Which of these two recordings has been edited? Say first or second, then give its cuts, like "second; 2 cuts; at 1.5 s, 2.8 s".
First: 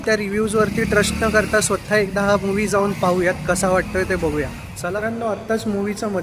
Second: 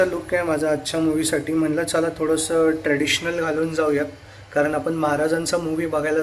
first; 1 cut; at 4.9 s